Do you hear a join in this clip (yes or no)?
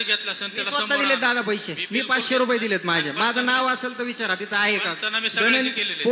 no